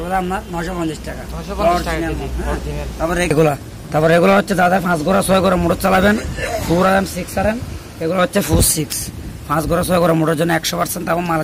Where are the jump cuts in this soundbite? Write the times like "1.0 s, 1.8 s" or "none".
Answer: 3.3 s

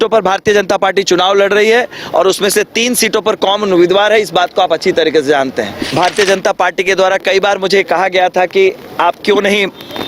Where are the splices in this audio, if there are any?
5.8 s

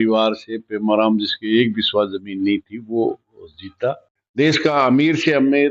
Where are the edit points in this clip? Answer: 4.1 s

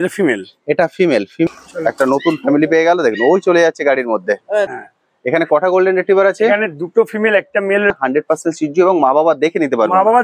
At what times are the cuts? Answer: 1.5 s, 4.7 s, 7.9 s

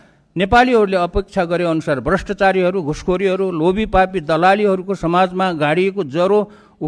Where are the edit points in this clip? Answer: none

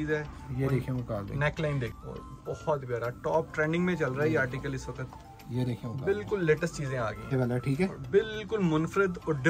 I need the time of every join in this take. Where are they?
2.0 s, 7.3 s

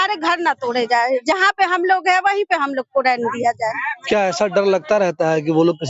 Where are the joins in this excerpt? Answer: 3.9 s

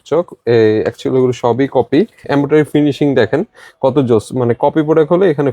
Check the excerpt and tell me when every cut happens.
2.2 s

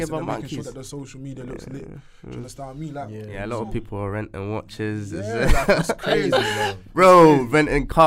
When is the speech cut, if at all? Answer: 3.3 s

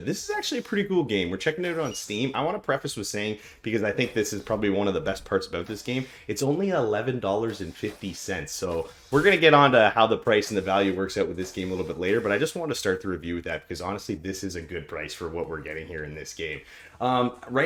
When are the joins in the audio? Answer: none

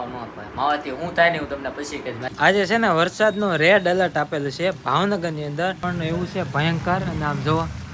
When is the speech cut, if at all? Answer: 2.4 s, 5.9 s

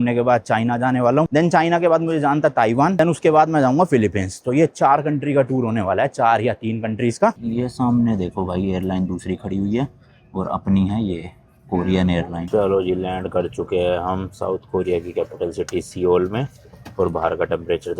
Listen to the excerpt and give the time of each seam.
1.3 s, 3.0 s, 7.3 s, 12.5 s

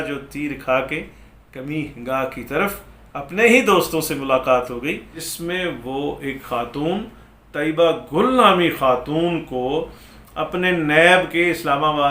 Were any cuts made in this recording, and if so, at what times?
5.1 s

